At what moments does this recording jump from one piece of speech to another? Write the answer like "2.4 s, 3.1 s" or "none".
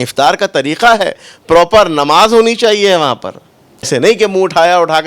3.9 s

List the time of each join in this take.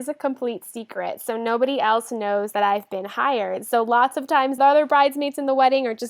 4.6 s

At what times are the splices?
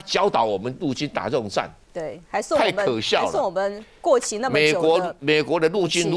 none

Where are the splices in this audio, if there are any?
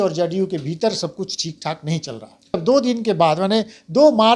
2.6 s

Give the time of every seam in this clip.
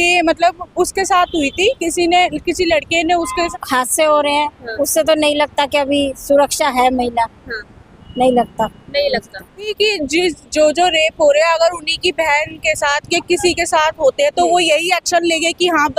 3.5 s, 9.7 s

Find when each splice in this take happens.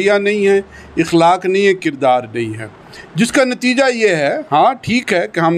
none

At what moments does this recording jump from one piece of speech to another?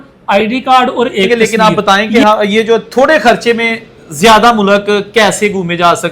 1.3 s

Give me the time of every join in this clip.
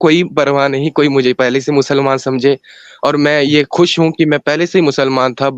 none

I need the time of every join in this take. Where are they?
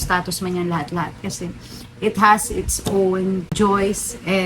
3.5 s

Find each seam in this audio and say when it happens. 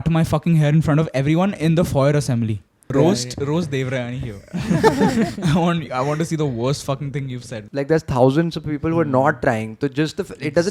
2.9 s, 7.6 s

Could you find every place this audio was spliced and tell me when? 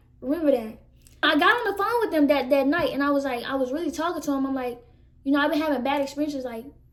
none

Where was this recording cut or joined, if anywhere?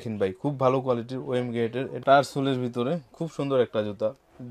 1.9 s

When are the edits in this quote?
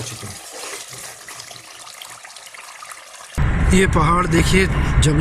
3.4 s

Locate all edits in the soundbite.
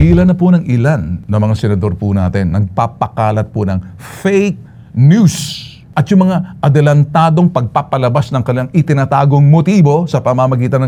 none

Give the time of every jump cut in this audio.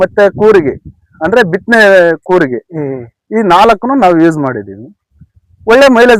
none

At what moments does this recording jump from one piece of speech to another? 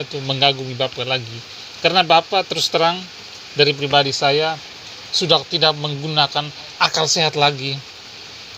6.6 s

